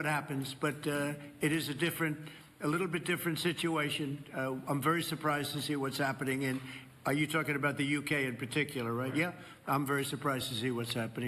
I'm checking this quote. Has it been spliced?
no; 0 cuts

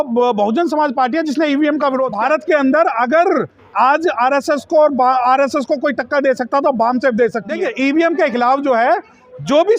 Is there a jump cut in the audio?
yes; 2 cuts; at 2.1 s, 7.6 s

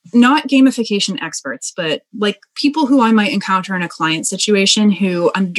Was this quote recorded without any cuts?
yes; 0 cuts

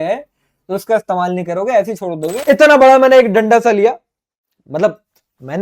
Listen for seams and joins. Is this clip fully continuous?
no; 1 cut; at 2.3 s

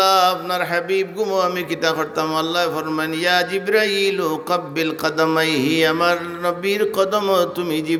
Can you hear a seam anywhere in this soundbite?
no; 0 cuts

